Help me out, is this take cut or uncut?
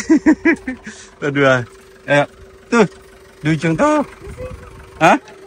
uncut